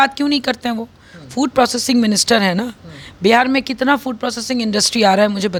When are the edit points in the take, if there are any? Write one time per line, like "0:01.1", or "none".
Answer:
none